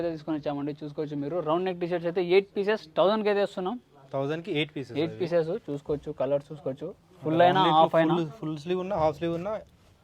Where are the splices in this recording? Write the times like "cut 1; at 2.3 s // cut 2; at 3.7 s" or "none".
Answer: none